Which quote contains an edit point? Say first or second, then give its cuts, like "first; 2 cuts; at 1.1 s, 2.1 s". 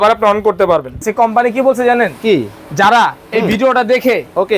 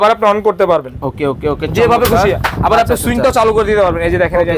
first; 1 cut; at 1.1 s